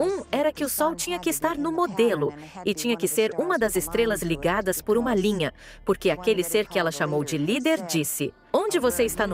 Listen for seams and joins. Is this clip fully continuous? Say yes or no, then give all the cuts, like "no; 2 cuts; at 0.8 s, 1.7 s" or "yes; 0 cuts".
yes; 0 cuts